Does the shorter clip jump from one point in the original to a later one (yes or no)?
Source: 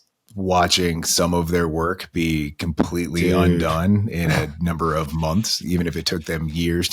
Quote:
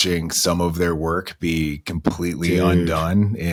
no